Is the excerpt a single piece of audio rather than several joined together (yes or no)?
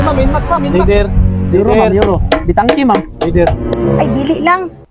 yes